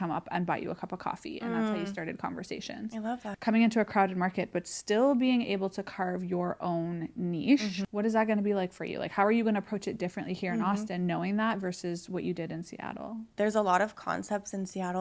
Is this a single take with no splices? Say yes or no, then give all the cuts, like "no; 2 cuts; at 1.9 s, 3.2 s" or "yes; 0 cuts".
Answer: no; 3 cuts; at 3.3 s, 7.8 s, 13.3 s